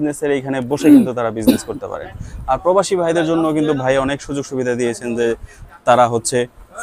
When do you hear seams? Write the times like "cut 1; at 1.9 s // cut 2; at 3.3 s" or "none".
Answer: none